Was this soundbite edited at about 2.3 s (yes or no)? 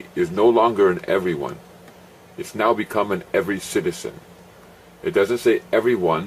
no